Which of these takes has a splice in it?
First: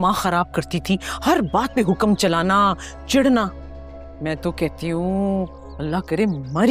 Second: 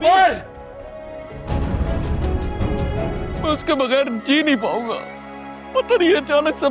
second; 1 cut; at 3.4 s

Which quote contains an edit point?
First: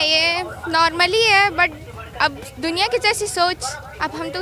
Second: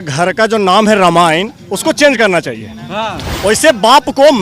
second; 1 cut; at 3.2 s

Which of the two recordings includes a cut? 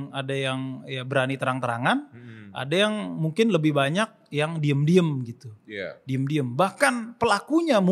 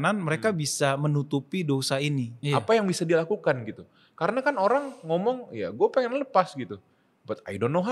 second; 1 cut; at 2.3 s

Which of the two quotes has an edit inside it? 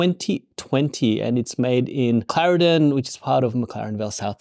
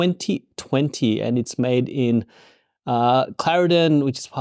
first; 1 cut; at 2.3 s

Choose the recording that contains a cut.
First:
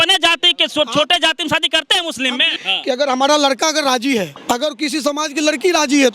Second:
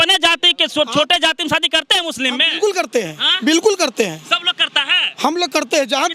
first; 2 cuts; at 2.5 s, 4.3 s

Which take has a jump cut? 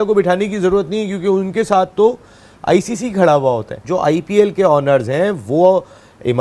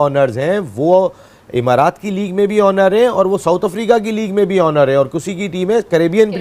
first; 1 cut; at 3.8 s

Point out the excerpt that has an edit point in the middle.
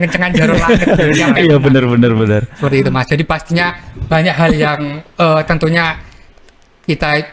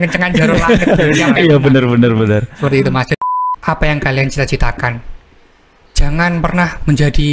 second; 1 cut; at 3.2 s

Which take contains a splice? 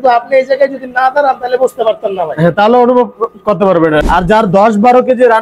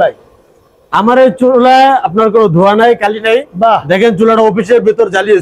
first; 1 cut; at 4.1 s

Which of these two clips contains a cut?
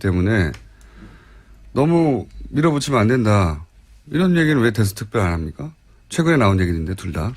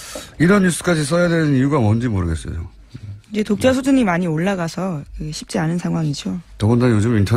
first; 1 cut; at 2.8 s

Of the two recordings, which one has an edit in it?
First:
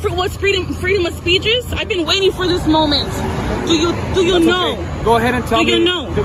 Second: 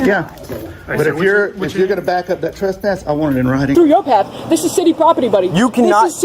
second; 1 cut; at 3.7 s

